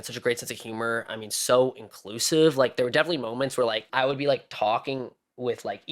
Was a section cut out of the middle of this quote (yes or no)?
yes